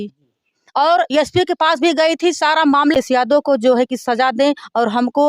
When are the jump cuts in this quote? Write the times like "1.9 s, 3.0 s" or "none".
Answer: 2.9 s

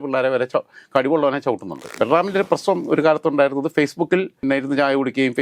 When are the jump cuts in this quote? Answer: 1.9 s, 4.4 s

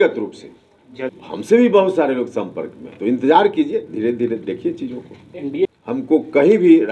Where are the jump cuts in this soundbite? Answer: 1.1 s, 5.7 s

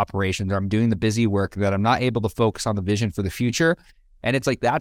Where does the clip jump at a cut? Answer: none

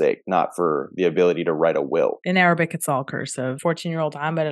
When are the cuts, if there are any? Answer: 2.2 s, 3.6 s

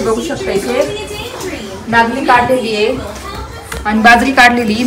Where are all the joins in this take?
none

